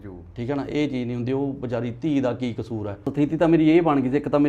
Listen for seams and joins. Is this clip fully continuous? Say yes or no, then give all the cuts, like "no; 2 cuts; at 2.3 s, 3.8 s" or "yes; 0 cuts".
no; 1 cut; at 3.0 s